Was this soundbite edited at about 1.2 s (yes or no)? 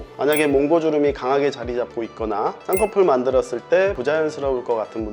no